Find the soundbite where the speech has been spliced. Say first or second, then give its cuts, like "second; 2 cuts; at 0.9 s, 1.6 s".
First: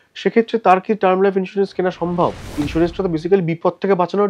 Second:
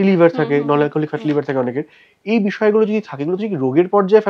first; 1 cut; at 2.4 s